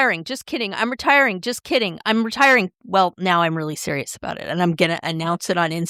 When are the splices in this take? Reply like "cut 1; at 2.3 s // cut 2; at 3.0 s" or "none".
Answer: none